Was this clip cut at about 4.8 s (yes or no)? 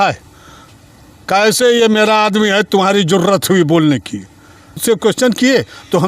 yes